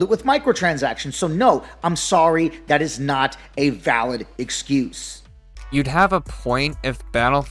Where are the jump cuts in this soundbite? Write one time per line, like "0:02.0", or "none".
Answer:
none